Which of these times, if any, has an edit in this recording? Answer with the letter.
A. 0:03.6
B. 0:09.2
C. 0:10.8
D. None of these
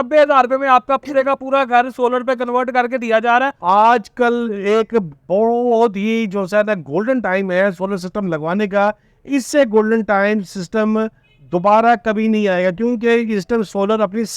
A